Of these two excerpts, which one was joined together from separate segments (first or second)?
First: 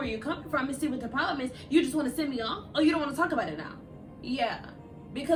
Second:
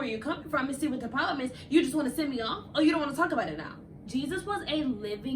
second